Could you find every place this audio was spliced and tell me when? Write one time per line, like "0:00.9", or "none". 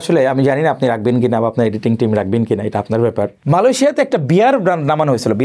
0:03.4